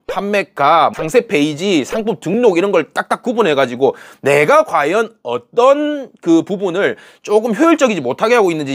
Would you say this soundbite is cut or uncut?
uncut